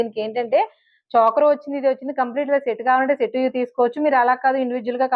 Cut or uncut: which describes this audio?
uncut